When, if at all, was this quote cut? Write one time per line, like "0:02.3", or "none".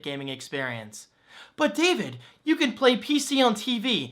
0:01.1